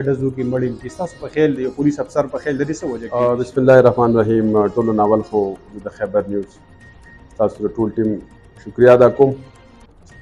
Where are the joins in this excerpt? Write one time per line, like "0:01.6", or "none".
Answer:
none